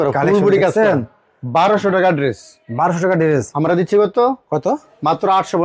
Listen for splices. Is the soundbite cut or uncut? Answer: uncut